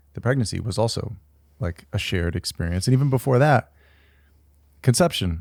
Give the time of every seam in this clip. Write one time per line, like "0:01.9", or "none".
none